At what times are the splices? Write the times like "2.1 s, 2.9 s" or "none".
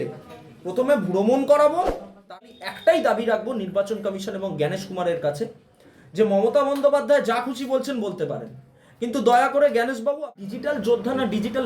2.3 s, 10.4 s